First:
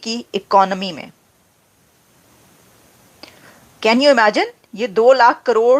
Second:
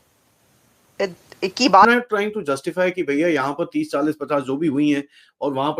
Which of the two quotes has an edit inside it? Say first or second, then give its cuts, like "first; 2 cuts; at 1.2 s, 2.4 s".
second; 1 cut; at 1.9 s